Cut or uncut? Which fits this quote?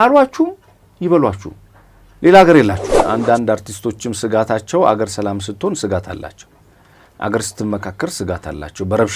cut